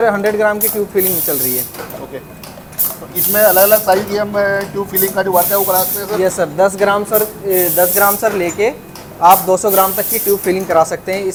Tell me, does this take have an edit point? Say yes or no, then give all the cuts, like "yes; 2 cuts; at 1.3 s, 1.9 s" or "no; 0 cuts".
no; 0 cuts